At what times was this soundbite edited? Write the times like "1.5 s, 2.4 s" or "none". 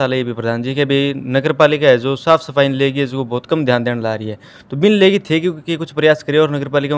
none